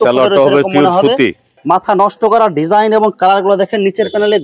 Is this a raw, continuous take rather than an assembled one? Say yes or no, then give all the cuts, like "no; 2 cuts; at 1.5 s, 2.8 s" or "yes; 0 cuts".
no; 1 cut; at 1.5 s